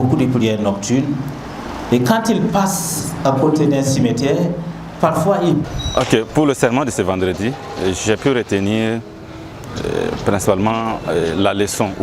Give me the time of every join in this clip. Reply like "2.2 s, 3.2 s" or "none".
5.7 s